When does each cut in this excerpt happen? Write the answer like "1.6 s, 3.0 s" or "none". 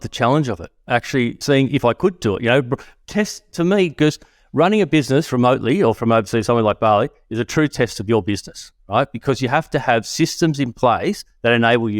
1.4 s, 6.0 s